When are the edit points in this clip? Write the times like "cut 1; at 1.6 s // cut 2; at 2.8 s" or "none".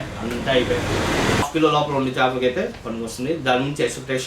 cut 1; at 1.4 s